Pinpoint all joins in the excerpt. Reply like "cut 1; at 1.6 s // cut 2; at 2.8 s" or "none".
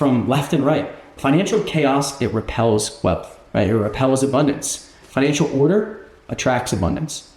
cut 1; at 1.1 s // cut 2; at 3.3 s